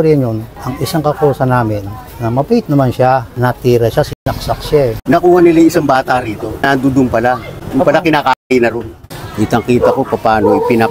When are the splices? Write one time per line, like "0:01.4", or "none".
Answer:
0:05.0